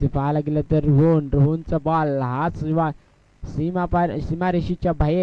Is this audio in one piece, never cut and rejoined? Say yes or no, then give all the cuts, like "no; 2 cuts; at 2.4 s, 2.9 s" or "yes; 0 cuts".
yes; 0 cuts